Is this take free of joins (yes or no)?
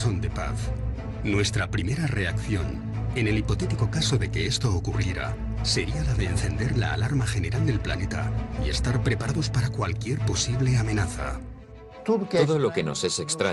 yes